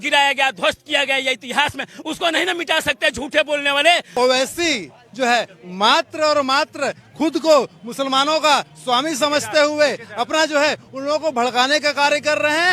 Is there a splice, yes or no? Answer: yes